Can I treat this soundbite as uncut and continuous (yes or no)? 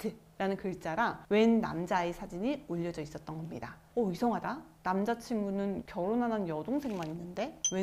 yes